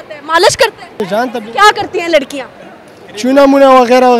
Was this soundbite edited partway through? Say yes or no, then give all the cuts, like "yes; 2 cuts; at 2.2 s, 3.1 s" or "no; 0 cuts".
yes; 1 cut; at 1.0 s